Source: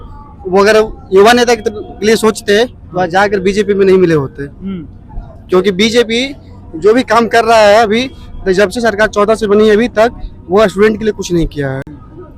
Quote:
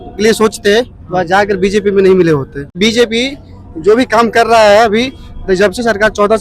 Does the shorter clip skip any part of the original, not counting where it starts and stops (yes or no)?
yes